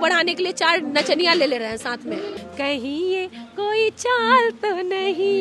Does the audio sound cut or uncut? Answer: cut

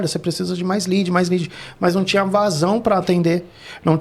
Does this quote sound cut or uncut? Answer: uncut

